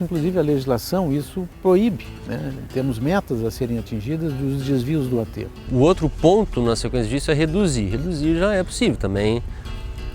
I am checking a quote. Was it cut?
yes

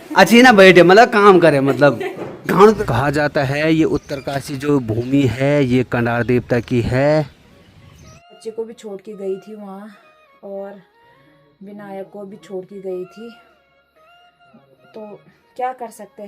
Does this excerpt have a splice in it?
yes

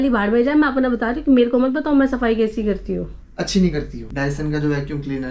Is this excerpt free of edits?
no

